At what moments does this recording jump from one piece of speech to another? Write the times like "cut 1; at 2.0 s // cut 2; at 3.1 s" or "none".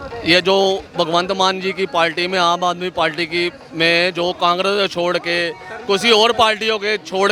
none